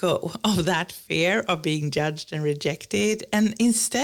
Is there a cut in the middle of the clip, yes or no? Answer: no